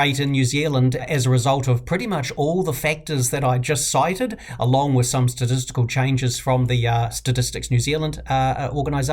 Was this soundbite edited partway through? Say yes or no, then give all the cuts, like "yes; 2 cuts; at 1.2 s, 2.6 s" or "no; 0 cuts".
yes; 2 cuts; at 1.1 s, 7.1 s